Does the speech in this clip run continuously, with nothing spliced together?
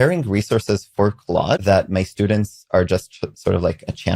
no; 1 cut; at 1.6 s

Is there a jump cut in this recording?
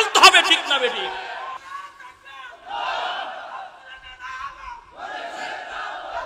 yes; 1 cut; at 1.6 s

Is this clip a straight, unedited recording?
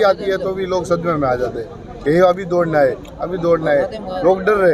yes; 0 cuts

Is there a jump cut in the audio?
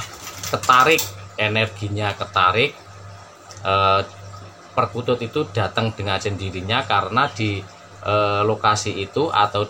no; 0 cuts

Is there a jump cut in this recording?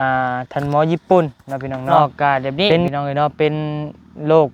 yes; 1 cut; at 1.9 s

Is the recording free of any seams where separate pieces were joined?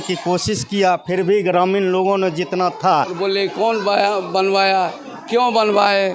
no; 1 cut; at 3.1 s

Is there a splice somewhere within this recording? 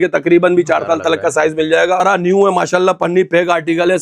yes; 1 cut; at 2.0 s

